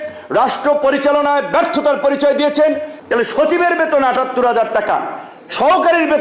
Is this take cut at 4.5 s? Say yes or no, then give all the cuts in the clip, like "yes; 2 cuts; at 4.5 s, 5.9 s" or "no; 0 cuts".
no; 1 cut; at 2.9 s